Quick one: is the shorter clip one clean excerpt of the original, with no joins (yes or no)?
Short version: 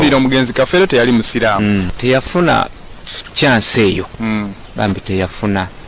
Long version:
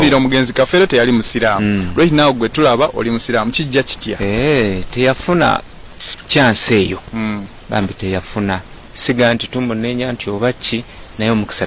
no